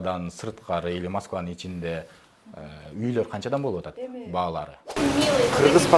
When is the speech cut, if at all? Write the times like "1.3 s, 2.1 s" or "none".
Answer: 4.9 s